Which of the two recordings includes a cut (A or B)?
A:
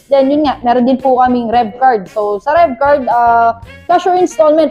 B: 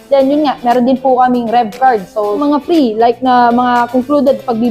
B